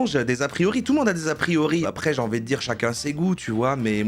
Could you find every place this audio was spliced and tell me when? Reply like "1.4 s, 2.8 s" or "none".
1.8 s